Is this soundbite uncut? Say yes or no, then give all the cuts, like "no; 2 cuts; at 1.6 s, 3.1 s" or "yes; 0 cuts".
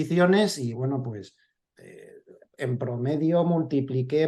yes; 0 cuts